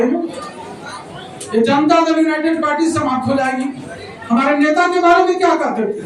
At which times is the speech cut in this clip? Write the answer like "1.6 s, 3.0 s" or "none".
none